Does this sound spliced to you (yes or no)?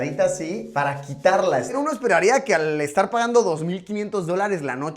yes